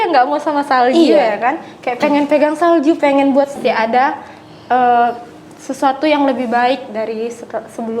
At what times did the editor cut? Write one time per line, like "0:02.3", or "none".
0:03.6